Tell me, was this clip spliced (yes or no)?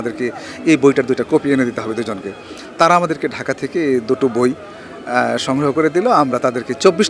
no